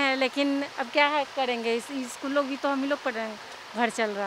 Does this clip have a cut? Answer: no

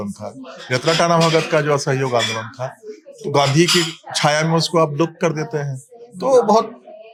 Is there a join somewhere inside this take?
no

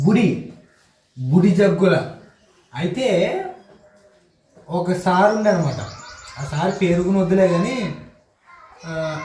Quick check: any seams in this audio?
no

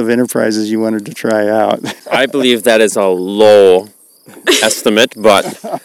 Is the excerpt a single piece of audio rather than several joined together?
no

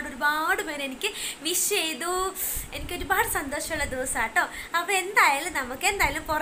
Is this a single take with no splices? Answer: yes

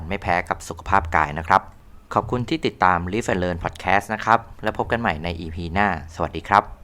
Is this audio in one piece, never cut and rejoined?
yes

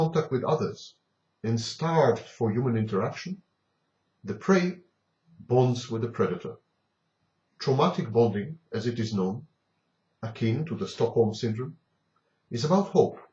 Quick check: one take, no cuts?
yes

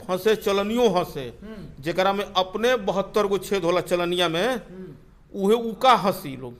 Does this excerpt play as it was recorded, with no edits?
yes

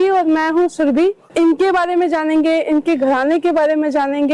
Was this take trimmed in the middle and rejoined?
yes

